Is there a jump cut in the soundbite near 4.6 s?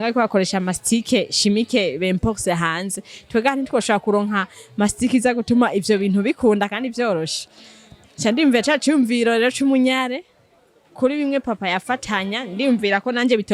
no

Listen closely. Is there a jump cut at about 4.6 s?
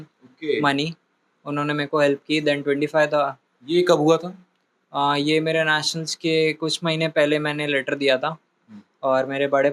no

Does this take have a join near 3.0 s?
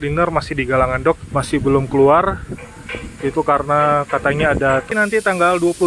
no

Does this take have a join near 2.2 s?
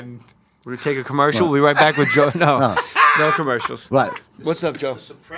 no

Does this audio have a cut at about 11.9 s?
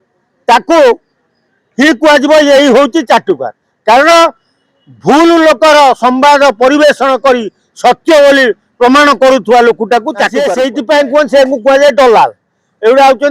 no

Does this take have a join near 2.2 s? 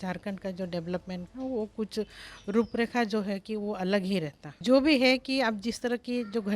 no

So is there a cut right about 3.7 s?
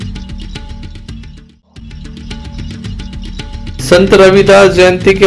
yes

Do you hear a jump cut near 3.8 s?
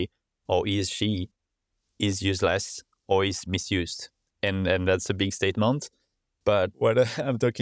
no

